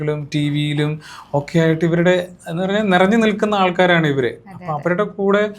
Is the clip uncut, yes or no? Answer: yes